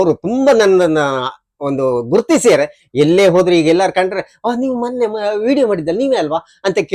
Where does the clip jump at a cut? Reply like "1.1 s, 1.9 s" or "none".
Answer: none